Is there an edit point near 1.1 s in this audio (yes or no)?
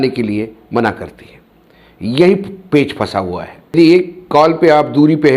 no